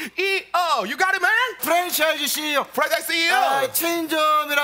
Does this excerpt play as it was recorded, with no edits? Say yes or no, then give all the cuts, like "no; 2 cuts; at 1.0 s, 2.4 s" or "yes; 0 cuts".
no; 1 cut; at 1.6 s